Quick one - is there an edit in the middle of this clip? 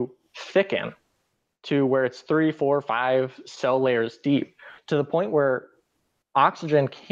no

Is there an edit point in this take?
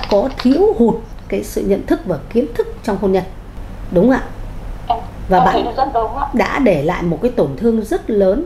no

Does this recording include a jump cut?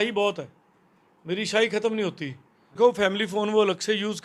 yes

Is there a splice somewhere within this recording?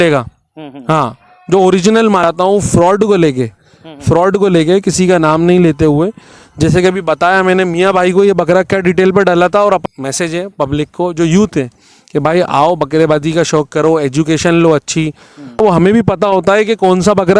yes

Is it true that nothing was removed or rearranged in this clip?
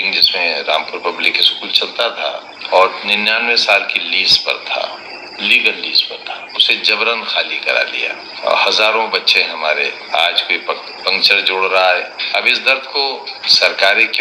no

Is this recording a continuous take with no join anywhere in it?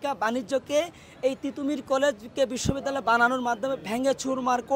yes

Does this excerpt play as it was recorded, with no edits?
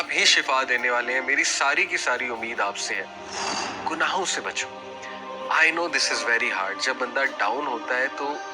no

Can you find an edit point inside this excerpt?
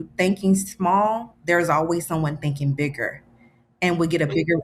no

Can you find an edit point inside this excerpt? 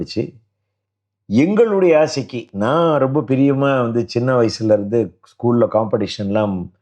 no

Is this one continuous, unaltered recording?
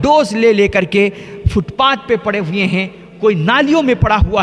yes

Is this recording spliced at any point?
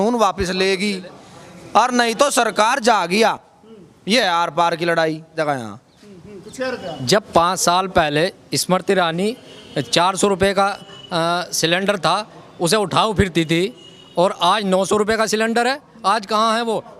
no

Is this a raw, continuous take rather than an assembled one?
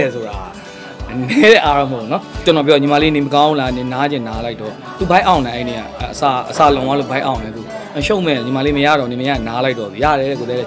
no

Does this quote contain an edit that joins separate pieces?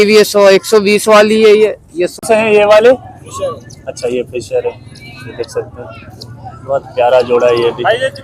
yes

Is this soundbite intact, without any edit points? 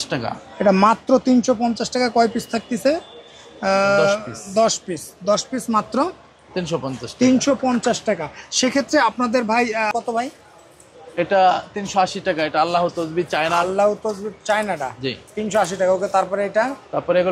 no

